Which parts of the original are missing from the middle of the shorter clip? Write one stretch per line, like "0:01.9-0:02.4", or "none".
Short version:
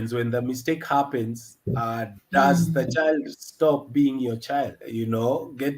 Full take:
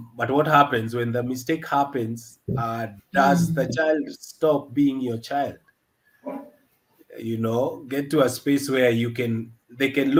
0:05.6-0:07.1